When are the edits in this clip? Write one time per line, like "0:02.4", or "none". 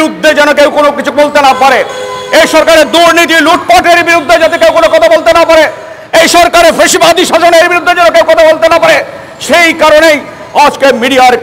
none